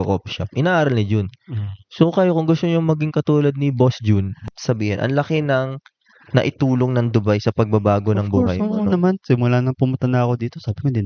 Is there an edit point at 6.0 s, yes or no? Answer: no